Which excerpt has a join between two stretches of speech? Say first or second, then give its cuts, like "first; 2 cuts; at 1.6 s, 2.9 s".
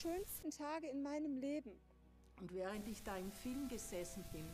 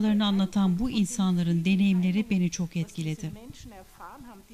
second; 1 cut; at 1.6 s